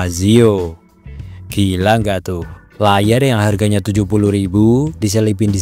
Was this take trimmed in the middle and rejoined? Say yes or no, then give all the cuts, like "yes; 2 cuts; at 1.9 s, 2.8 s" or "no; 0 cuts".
no; 0 cuts